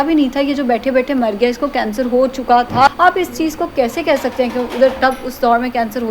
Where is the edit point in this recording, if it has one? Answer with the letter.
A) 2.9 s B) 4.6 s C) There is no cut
A